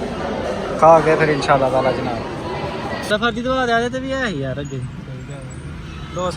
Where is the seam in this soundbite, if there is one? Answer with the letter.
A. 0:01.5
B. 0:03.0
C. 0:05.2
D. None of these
B